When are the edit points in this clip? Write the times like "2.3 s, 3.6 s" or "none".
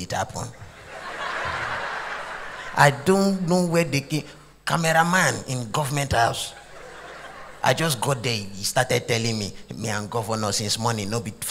none